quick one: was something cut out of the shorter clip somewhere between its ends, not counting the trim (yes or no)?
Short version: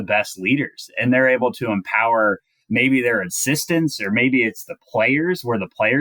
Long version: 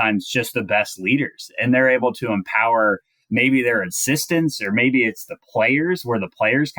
no